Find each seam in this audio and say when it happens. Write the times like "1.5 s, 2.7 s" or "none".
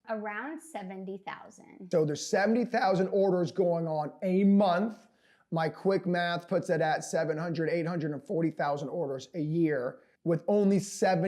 1.8 s